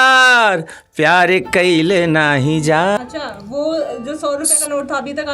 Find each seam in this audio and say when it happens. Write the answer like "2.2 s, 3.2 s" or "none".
3.0 s